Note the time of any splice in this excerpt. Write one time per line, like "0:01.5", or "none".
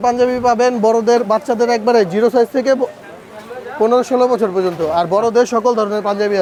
none